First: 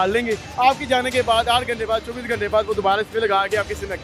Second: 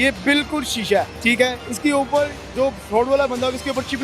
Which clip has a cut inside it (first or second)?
second